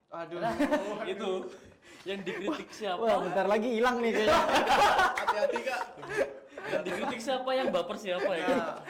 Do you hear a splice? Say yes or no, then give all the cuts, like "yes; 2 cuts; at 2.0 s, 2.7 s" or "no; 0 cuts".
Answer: no; 0 cuts